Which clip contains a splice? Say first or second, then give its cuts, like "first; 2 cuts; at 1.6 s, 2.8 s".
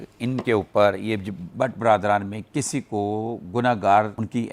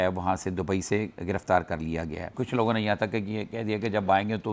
second; 1 cut; at 2.3 s